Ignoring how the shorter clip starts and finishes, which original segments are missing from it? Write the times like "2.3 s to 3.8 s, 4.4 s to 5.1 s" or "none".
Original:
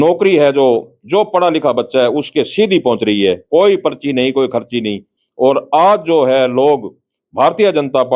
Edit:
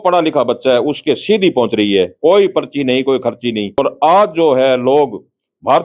5.1 s to 5.5 s